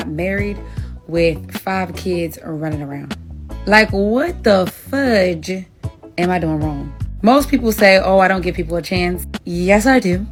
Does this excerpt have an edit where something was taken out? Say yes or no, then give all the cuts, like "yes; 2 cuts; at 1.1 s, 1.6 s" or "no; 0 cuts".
no; 0 cuts